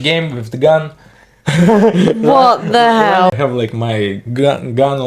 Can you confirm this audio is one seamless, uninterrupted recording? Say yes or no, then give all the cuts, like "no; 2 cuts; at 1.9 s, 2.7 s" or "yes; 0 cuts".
no; 1 cut; at 3.3 s